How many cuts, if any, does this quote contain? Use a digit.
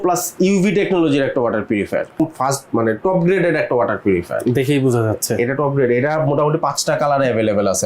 1